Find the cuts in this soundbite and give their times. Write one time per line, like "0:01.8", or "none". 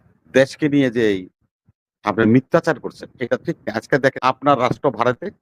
0:04.2